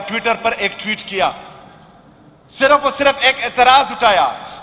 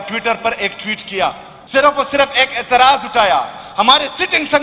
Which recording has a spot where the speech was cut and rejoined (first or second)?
second